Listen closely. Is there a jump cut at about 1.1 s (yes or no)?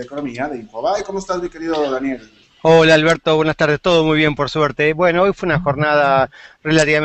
no